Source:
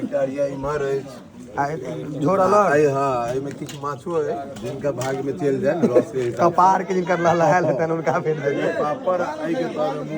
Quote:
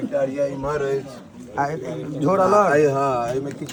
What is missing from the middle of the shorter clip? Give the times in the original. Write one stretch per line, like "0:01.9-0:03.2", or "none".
none

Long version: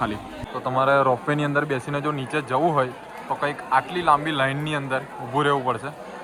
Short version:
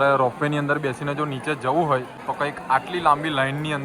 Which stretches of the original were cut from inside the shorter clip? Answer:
0:03.0-0:03.2

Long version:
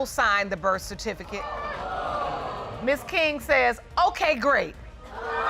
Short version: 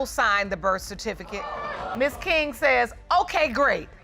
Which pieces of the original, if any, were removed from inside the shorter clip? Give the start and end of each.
0:01.9-0:02.8

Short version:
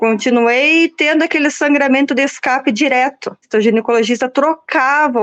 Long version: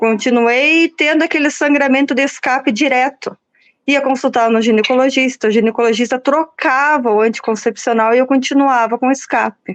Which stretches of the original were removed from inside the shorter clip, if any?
0:03.4-0:05.3

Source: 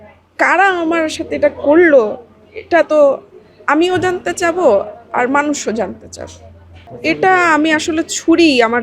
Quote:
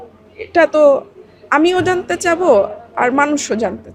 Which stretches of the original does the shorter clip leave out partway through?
none

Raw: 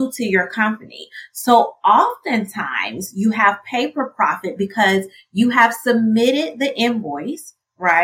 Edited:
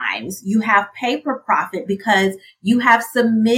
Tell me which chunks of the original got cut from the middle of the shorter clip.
none

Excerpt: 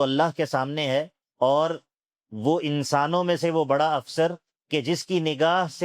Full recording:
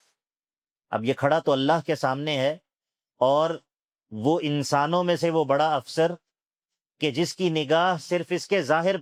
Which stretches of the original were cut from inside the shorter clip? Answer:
0:02.7-0:03.0
0:06.3-0:06.8

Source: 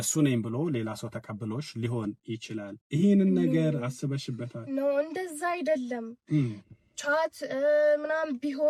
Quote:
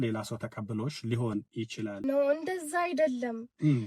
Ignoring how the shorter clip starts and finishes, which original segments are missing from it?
0:02.7-0:04.6

